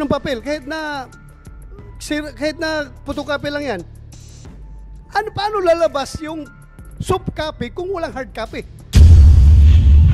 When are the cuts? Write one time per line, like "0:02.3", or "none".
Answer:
0:08.8